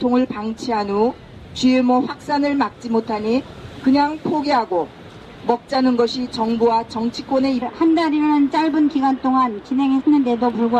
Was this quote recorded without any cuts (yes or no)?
yes